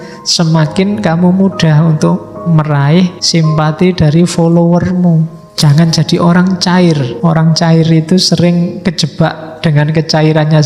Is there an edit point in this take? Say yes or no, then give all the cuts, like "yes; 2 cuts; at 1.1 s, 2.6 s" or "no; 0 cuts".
yes; 3 cuts; at 3.2 s, 5.4 s, 7.1 s